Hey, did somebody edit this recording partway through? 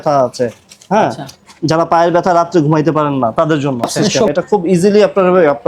yes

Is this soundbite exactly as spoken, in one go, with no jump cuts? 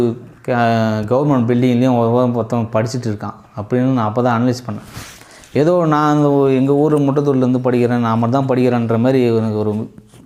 yes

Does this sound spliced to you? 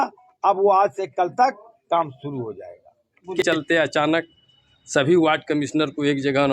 yes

